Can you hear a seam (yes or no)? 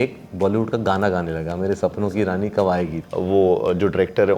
yes